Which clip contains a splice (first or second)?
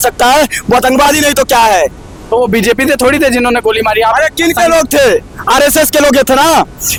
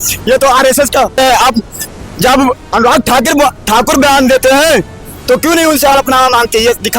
second